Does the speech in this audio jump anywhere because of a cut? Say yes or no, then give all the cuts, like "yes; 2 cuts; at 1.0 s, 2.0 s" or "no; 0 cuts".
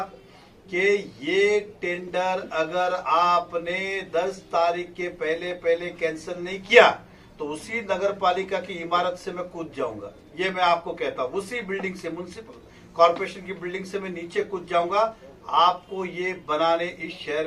no; 0 cuts